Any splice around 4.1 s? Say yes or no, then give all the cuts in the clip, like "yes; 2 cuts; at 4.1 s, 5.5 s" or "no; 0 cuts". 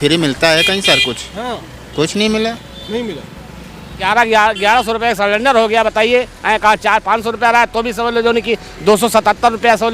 yes; 1 cut; at 4.1 s